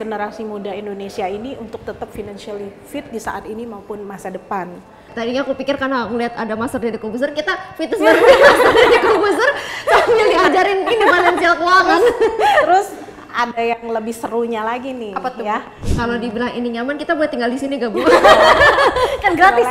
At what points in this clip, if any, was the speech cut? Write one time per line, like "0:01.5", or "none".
0:05.1
0:15.8